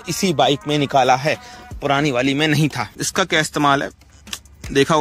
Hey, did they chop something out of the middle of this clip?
yes; 1 cut; at 3.0 s

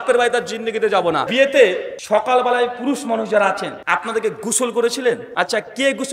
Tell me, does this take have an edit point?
yes; 4 cuts; at 1.3 s, 1.9 s, 3.7 s, 5.3 s

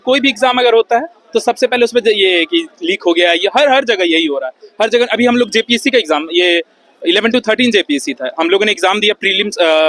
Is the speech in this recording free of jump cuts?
yes; 0 cuts

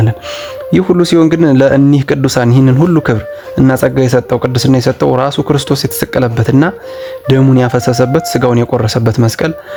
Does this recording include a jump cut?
no; 0 cuts

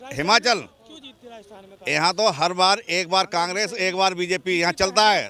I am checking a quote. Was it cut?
no; 0 cuts

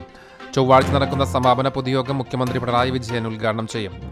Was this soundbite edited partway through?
no; 0 cuts

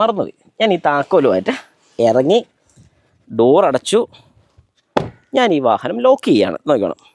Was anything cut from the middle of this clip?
no; 0 cuts

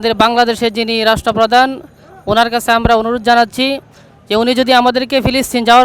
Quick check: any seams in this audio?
no; 0 cuts

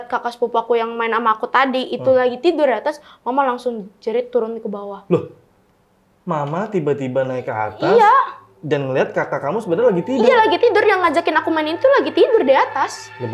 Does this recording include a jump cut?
no; 0 cuts

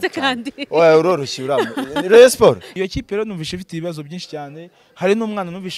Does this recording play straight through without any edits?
no; 1 cut; at 2.7 s

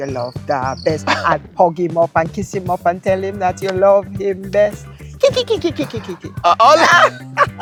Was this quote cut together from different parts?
no; 0 cuts

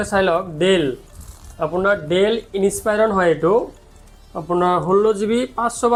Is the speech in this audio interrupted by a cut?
no; 0 cuts

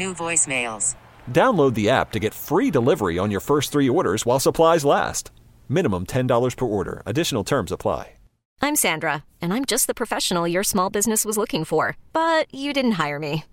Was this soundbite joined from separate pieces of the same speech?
yes; 1 cut; at 8.4 s

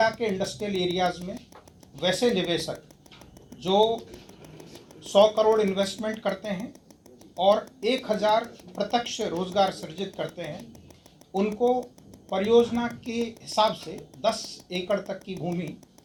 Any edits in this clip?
no; 0 cuts

